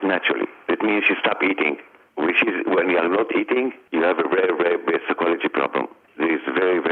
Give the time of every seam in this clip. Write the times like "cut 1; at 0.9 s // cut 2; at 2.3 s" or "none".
cut 1; at 2.0 s // cut 2; at 6.0 s